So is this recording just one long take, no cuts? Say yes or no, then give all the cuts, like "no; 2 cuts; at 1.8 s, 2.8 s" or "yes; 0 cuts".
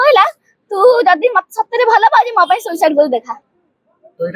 yes; 0 cuts